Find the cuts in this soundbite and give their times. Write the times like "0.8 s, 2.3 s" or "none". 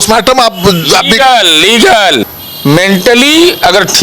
2.3 s